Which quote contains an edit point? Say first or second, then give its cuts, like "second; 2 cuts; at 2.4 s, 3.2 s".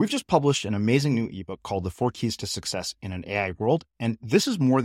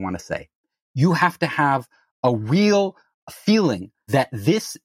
second; 2 cuts; at 3.2 s, 4.1 s